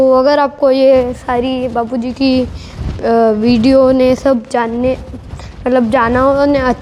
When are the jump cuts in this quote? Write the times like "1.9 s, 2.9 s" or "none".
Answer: none